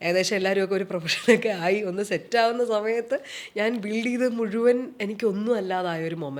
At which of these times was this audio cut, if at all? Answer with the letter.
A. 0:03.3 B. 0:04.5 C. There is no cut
C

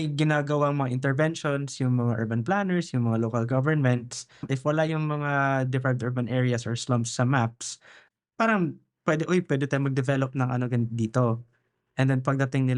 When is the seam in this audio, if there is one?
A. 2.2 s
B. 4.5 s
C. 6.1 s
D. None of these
B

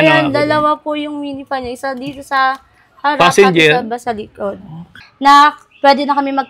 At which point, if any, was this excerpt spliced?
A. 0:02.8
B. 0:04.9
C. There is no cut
B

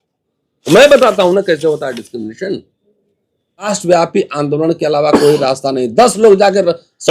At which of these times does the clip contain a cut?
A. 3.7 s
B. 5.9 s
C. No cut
A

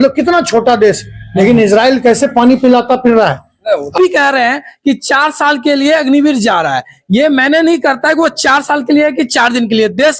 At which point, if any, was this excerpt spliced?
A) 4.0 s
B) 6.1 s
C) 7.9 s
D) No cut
A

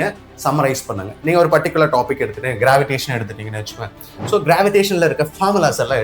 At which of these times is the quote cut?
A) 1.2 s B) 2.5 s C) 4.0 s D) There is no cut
D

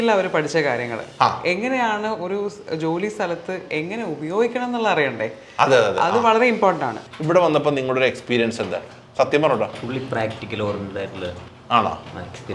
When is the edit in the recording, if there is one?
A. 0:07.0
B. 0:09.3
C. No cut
A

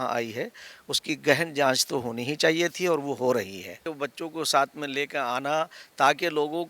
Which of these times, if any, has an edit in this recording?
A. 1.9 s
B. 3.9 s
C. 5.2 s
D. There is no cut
B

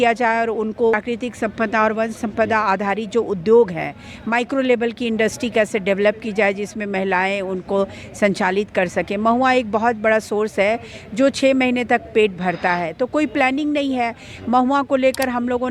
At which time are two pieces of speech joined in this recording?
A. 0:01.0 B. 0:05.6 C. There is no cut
A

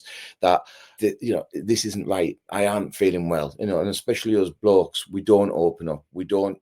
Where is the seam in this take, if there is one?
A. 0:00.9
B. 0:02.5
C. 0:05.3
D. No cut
A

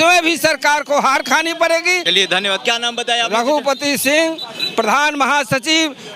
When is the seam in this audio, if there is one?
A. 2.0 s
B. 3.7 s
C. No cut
A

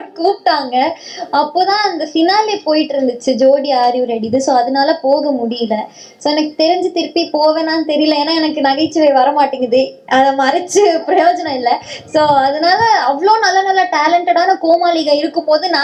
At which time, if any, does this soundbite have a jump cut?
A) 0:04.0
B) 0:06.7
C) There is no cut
C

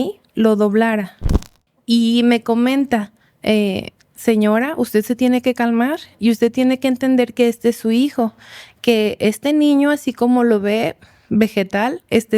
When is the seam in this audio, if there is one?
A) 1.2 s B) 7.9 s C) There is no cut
A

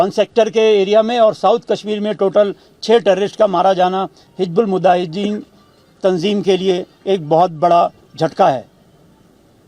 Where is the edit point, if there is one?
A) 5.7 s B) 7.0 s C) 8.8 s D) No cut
D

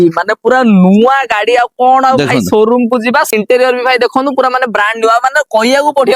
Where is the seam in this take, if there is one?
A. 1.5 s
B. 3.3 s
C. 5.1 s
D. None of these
B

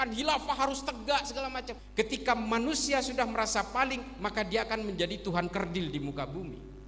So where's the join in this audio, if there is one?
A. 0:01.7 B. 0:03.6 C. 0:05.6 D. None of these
A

